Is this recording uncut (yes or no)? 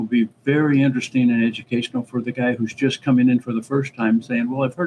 yes